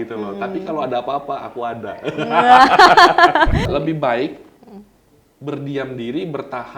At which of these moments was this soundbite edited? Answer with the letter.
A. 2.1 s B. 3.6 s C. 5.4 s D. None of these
B